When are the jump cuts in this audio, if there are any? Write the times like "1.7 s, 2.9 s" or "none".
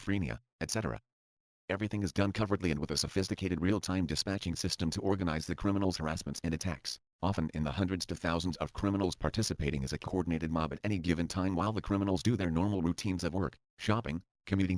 2.9 s